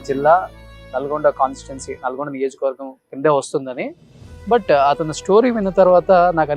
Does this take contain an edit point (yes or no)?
no